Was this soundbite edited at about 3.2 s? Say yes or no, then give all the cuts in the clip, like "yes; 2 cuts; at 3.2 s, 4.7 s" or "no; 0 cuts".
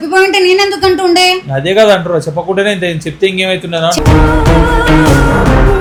no; 0 cuts